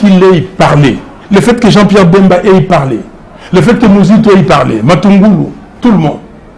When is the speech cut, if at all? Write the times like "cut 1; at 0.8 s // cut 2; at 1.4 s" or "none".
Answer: cut 1; at 1.1 s